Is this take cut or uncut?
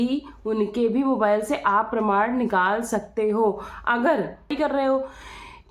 cut